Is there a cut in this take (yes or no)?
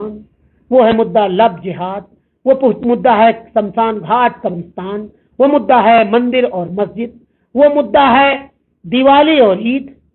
no